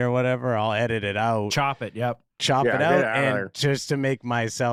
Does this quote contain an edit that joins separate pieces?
no; 0 cuts

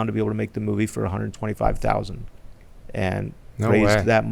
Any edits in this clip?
no; 0 cuts

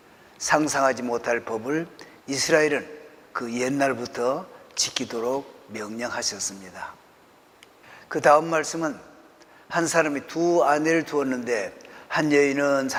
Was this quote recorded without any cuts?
yes; 0 cuts

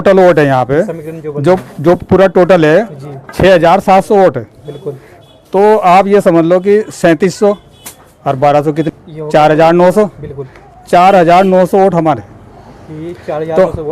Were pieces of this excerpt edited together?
yes; 1 cut; at 8.9 s

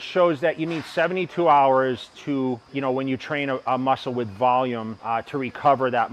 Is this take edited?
no; 0 cuts

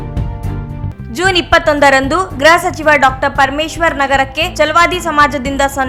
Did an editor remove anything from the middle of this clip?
no; 0 cuts

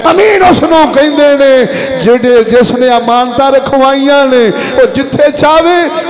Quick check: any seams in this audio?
no; 0 cuts

